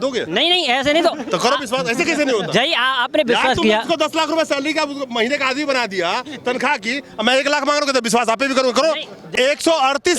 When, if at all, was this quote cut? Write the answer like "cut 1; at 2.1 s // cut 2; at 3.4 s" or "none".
cut 1; at 9.3 s